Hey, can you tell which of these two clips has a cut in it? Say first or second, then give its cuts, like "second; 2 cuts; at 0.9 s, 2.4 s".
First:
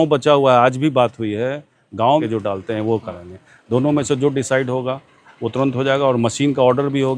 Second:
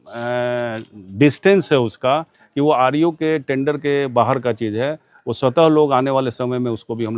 first; 1 cut; at 2.2 s